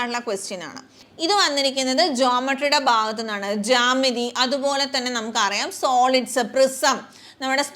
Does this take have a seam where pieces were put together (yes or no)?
yes